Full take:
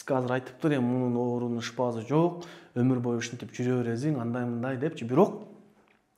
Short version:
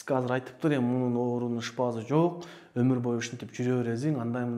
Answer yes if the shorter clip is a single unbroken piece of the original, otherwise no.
yes